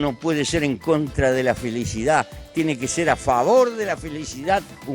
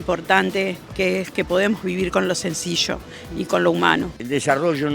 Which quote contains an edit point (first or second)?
second